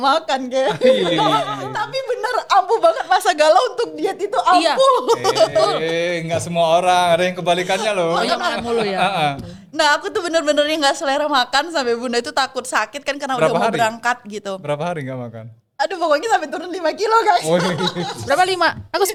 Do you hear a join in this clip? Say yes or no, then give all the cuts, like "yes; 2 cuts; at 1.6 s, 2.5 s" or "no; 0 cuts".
no; 0 cuts